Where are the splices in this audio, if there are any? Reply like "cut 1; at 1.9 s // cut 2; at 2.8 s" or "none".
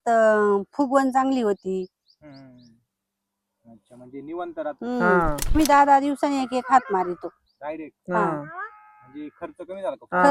cut 1; at 5.5 s